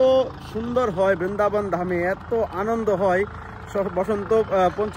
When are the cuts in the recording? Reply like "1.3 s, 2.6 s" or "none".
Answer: none